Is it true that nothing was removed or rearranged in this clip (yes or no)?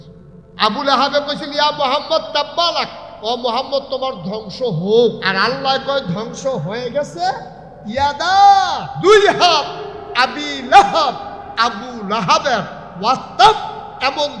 no